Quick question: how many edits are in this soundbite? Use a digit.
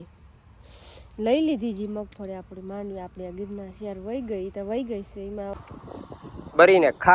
1